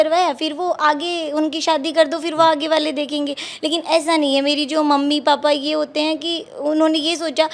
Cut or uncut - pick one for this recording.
uncut